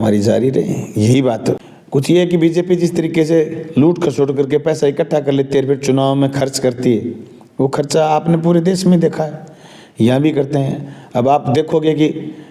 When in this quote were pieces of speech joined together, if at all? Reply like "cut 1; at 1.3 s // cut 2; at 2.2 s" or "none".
cut 1; at 1.7 s